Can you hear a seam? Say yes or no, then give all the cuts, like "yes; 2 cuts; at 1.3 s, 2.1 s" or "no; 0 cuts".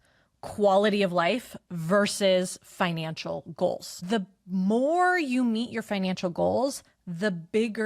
yes; 1 cut; at 3.9 s